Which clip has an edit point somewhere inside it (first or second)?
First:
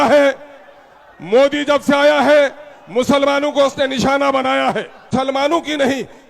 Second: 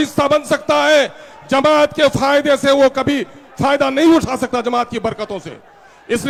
first